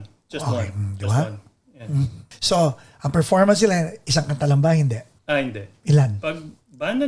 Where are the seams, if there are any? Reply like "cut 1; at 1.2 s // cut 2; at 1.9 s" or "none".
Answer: cut 1; at 2.3 s // cut 2; at 5.1 s